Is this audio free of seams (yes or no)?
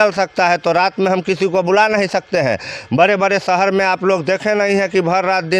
yes